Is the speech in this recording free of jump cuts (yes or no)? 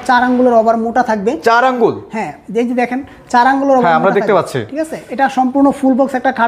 yes